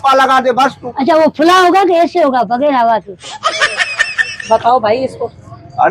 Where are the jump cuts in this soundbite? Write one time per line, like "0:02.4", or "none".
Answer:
none